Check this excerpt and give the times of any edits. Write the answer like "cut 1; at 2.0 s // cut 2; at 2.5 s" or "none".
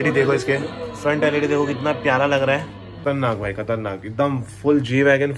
cut 1; at 2.9 s